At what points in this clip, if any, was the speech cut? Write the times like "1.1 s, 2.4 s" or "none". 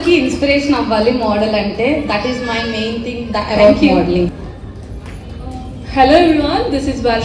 none